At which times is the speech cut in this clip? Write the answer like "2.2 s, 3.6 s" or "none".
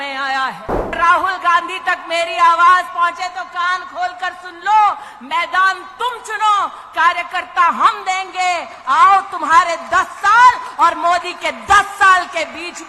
0.9 s